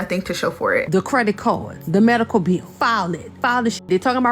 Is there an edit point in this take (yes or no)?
yes